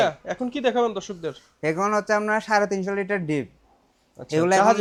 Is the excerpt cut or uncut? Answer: uncut